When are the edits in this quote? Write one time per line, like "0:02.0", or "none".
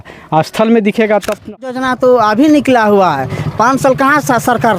0:01.7